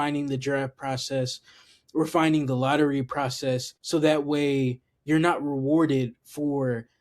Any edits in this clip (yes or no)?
yes